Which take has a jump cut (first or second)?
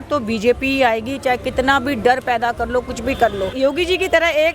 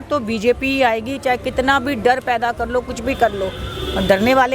first